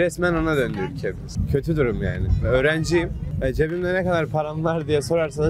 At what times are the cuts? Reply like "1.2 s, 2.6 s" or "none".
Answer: none